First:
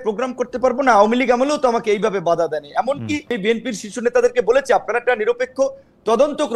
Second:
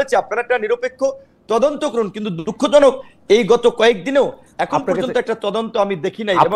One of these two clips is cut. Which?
first; 1 cut; at 3.4 s

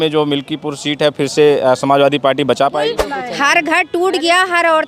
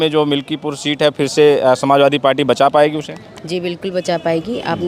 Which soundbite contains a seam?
first; 1 cut; at 3.0 s

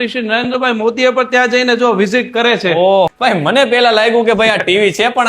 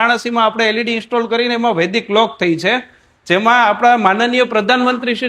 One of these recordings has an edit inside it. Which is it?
first; 1 cut; at 3.1 s

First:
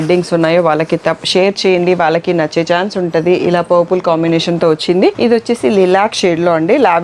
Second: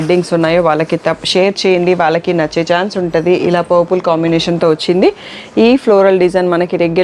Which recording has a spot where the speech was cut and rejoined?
first; 1 cut; at 5.2 s

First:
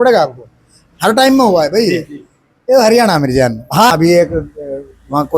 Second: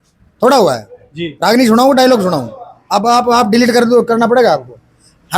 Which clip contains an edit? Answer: first; 1 cut; at 3.9 s

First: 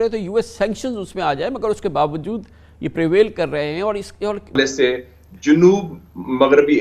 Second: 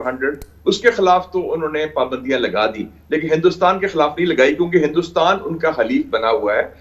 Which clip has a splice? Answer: first; 1 cut; at 4.6 s

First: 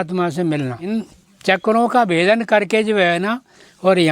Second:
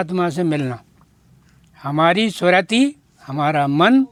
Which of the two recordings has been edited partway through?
first; 1 cut; at 0.9 s

